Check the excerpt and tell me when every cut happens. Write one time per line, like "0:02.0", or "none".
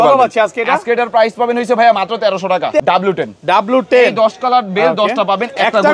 0:02.8